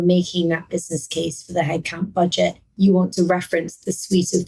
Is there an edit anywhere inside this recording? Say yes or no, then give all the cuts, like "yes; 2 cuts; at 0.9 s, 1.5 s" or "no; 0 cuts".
yes; 1 cut; at 2.6 s